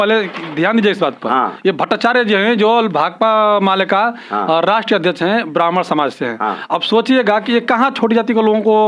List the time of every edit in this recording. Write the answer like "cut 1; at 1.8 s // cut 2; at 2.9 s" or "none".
none